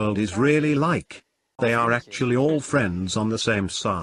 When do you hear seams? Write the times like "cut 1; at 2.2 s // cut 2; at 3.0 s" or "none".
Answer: cut 1; at 1.5 s